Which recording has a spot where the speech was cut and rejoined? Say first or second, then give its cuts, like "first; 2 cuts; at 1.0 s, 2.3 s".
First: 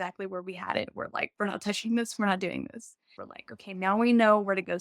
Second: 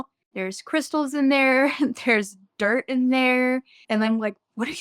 first; 2 cuts; at 1.3 s, 3.1 s